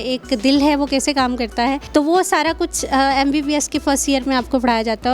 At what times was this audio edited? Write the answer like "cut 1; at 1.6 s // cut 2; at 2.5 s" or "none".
cut 1; at 1.8 s